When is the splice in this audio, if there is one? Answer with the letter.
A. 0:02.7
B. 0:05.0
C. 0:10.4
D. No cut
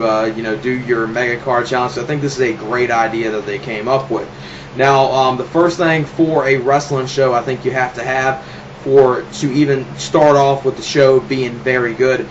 C